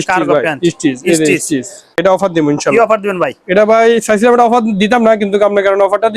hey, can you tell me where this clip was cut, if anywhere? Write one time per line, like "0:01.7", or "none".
0:02.0